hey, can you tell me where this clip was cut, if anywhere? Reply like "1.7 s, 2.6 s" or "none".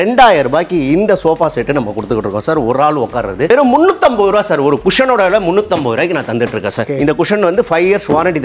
3.5 s, 6.8 s